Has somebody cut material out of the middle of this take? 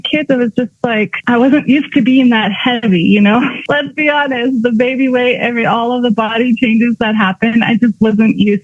yes; 2 cuts; at 1.2 s, 3.6 s

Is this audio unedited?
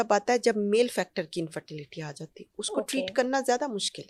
yes; 0 cuts

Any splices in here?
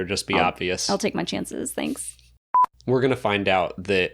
yes; 1 cut; at 2.4 s

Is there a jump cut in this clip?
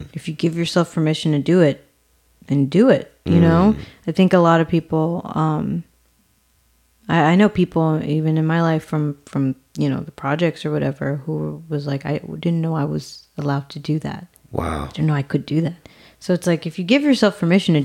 no; 0 cuts

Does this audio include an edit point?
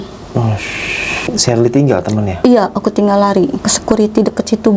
yes; 2 cuts; at 1.2 s, 3.7 s

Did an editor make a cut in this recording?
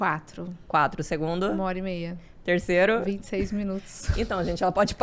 no; 0 cuts

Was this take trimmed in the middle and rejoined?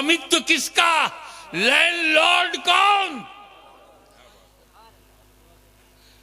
no; 0 cuts

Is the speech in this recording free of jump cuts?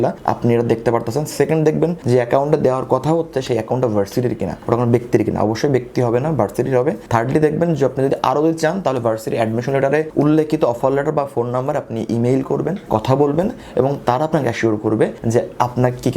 no; 1 cut; at 15.2 s

